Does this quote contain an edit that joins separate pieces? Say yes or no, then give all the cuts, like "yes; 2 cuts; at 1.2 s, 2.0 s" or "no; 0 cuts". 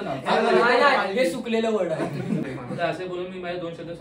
yes; 1 cut; at 2.4 s